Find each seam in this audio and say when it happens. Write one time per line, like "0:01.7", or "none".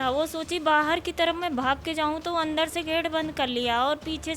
none